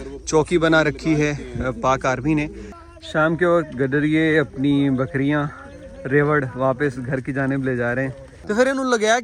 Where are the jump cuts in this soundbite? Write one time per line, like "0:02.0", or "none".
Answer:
0:02.6
0:08.3